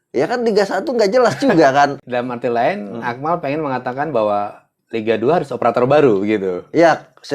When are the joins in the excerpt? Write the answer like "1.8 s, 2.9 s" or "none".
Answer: 2.0 s